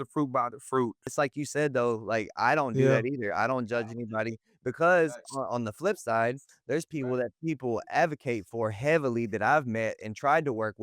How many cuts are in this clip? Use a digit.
1